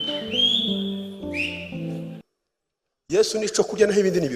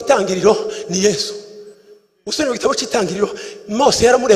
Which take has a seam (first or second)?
first